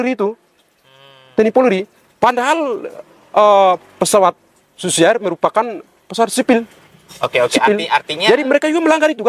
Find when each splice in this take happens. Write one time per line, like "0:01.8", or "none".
none